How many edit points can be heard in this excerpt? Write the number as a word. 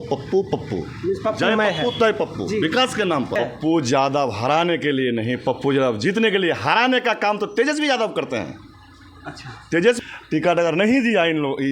two